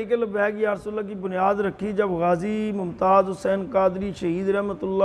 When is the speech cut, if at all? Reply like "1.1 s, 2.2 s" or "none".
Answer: none